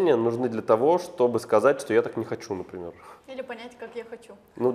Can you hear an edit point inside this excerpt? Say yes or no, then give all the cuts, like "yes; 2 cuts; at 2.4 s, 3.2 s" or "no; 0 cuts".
no; 0 cuts